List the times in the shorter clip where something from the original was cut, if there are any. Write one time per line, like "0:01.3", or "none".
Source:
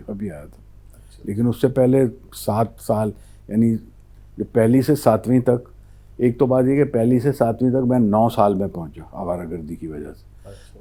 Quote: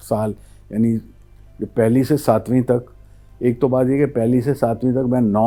none